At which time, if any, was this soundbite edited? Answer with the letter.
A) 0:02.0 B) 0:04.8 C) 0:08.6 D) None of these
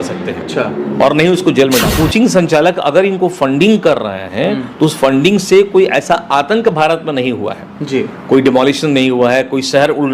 A